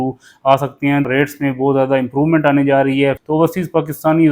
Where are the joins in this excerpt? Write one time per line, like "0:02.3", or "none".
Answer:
0:01.1
0:03.2

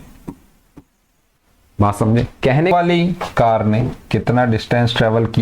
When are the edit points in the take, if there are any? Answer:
0:02.7

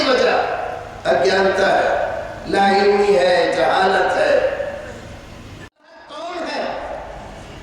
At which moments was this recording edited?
0:06.1

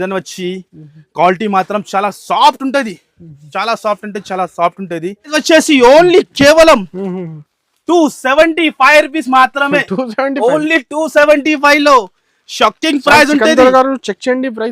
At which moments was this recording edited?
0:05.4

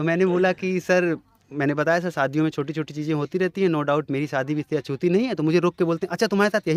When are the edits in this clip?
none

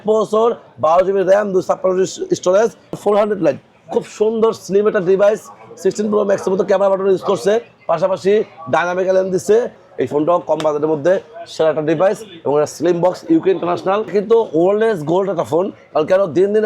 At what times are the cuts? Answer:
0:03.0
0:09.8
0:14.1

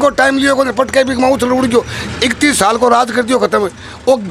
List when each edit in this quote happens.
none

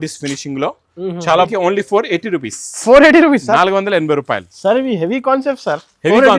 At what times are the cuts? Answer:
0:01.5

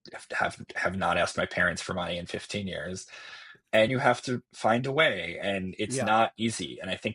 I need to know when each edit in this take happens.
0:03.9

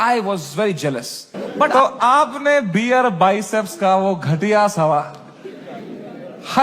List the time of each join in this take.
0:01.7

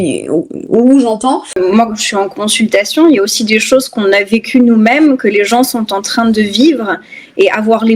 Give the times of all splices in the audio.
0:01.6

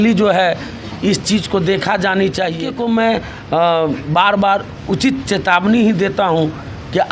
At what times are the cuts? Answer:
0:02.7

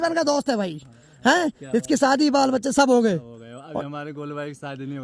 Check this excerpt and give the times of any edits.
none

